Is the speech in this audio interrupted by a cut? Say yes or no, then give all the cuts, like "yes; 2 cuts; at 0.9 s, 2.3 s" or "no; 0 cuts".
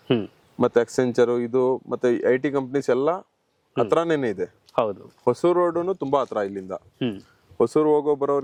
no; 0 cuts